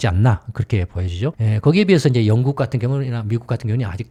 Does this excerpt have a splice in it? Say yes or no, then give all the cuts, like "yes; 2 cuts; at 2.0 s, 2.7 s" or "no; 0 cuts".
no; 0 cuts